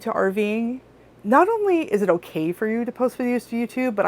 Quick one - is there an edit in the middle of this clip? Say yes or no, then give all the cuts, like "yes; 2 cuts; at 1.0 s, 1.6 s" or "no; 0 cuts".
yes; 1 cut; at 1.1 s